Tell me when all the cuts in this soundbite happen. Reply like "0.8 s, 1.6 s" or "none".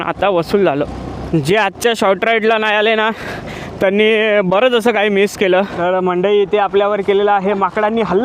1.2 s, 5.7 s